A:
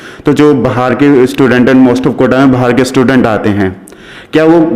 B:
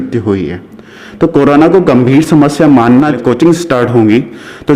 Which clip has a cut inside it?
B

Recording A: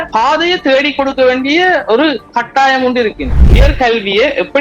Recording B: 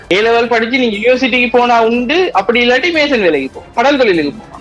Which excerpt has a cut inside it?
A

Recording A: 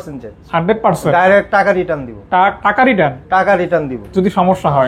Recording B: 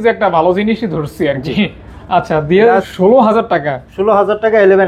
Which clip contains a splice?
B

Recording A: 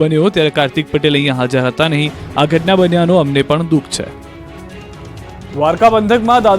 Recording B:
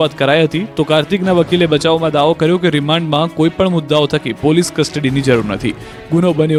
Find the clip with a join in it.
A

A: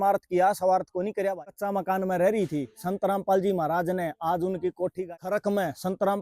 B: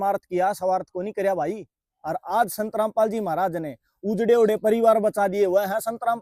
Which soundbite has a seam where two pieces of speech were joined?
A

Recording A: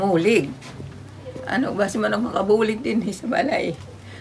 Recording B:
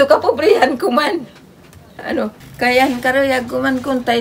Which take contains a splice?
B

